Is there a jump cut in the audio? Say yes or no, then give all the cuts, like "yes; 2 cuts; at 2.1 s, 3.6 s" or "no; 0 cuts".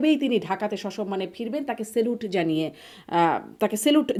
no; 0 cuts